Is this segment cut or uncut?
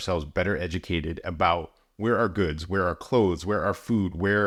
uncut